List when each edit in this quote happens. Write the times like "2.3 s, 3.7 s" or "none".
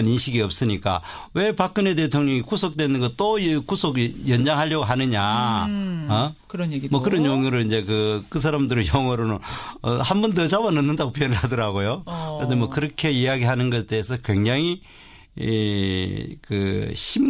4.7 s